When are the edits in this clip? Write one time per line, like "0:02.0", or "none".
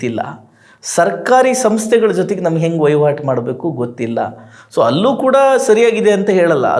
none